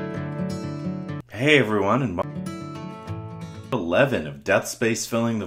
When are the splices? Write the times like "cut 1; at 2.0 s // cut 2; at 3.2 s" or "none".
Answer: cut 1; at 2.2 s // cut 2; at 3.6 s